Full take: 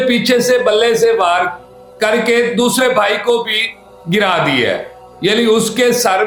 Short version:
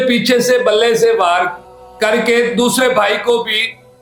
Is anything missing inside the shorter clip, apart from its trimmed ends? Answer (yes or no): no